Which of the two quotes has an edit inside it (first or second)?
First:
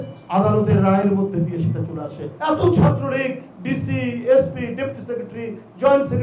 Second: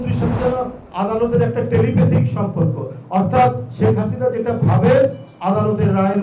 first